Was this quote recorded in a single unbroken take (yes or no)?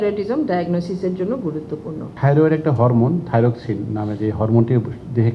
no